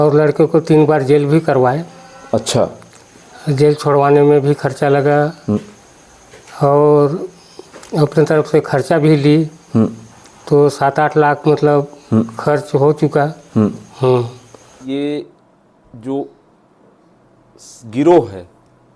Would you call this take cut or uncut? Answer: cut